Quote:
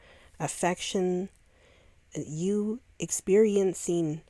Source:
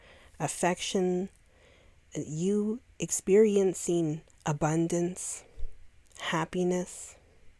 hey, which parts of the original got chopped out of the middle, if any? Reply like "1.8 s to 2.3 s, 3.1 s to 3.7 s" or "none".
none